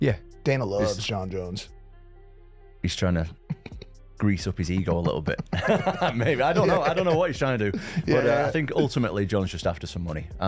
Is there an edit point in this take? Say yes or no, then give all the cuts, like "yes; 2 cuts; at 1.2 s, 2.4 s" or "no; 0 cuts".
no; 0 cuts